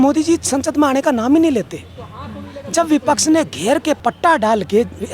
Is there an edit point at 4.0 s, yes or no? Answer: yes